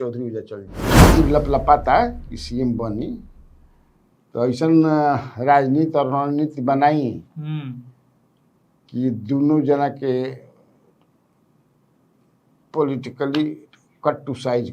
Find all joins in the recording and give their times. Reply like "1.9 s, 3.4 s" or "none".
0.9 s